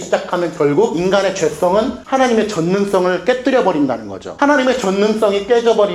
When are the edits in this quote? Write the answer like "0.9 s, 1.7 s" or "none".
1.0 s